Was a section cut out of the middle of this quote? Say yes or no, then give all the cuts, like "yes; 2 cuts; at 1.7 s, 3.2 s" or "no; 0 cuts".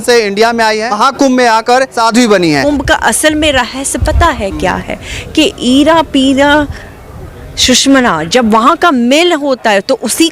yes; 3 cuts; at 0.9 s, 1.9 s, 2.6 s